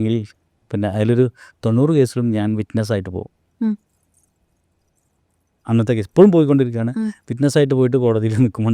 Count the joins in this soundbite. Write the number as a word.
zero